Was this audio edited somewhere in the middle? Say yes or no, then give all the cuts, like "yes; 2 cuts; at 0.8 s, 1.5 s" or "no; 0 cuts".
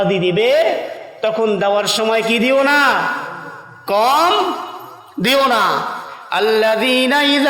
yes; 1 cut; at 6.0 s